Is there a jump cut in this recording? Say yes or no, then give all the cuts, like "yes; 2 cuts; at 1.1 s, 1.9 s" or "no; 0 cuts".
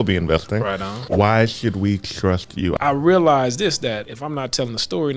yes; 3 cuts; at 0.9 s, 2.8 s, 4.1 s